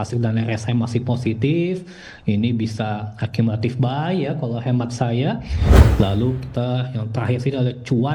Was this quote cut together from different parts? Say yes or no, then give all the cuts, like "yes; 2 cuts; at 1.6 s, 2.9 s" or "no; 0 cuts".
yes; 1 cut; at 5.6 s